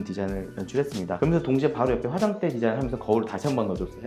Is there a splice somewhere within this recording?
no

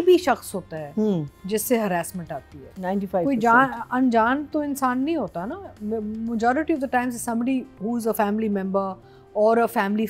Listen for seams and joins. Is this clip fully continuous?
yes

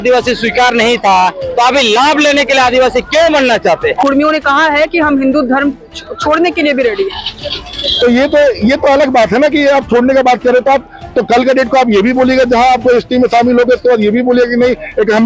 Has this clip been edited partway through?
yes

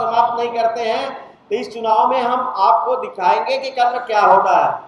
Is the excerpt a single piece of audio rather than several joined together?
yes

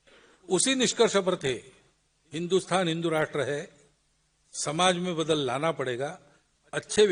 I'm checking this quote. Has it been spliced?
no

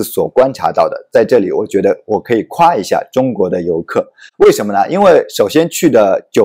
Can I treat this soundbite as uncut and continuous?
yes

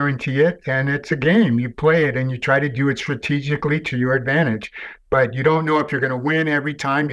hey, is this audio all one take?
yes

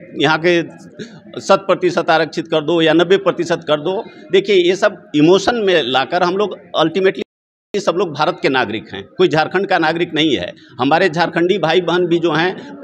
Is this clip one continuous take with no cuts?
yes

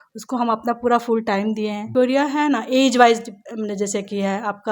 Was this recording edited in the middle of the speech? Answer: yes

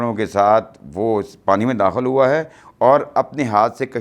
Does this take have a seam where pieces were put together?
no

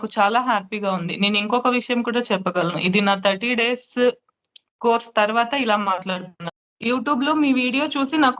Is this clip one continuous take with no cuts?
no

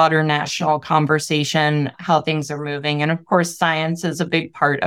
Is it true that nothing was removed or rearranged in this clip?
no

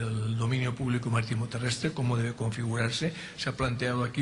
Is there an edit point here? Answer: no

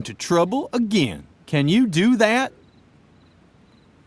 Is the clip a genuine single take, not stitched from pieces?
no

